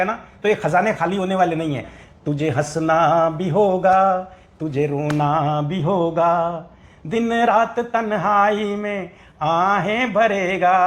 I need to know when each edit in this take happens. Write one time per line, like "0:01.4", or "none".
0:02.0